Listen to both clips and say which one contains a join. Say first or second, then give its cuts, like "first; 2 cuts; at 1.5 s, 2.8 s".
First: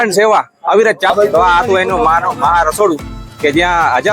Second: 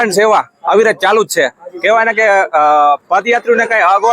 first; 1 cut; at 1.1 s